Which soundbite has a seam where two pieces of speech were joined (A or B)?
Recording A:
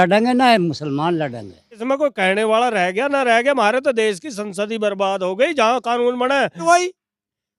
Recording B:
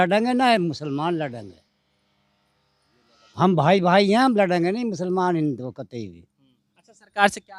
A